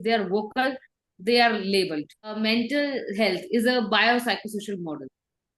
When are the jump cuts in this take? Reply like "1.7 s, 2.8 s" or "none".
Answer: 2.4 s